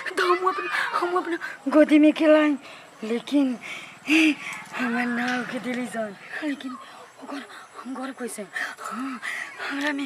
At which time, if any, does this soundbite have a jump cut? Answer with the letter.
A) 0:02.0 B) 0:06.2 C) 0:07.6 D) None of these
B